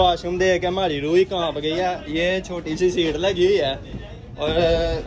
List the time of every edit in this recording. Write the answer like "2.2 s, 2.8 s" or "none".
2.0 s

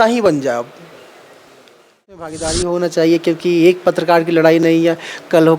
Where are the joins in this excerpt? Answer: 2.2 s

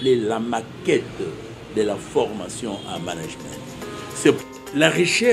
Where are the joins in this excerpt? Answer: 4.4 s

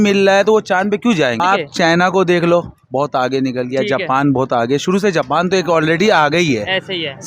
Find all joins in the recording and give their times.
1.4 s

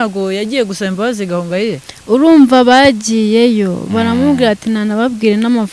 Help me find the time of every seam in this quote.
none

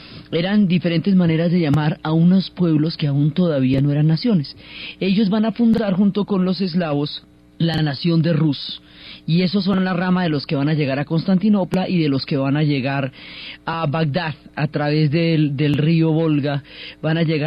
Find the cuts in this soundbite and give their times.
7.5 s

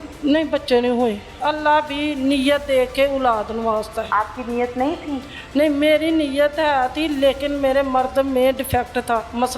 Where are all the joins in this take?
1.3 s

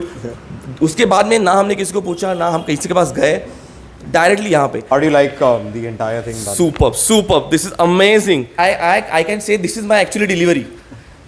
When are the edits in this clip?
4.8 s, 8.5 s

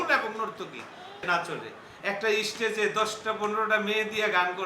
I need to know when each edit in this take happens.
1.2 s

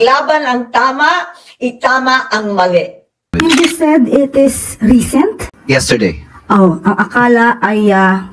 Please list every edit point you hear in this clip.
3.4 s

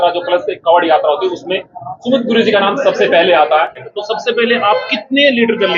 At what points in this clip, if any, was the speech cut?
3.9 s

